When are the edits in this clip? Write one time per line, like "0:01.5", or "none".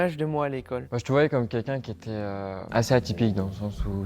0:00.9
0:02.6